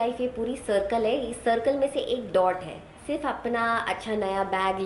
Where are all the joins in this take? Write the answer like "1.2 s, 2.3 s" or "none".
2.9 s